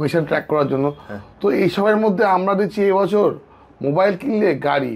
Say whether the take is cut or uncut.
uncut